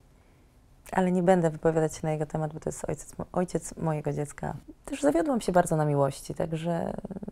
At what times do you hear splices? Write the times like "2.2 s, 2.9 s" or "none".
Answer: 4.6 s